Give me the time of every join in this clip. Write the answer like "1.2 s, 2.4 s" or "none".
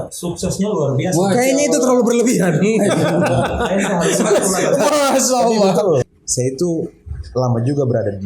6.1 s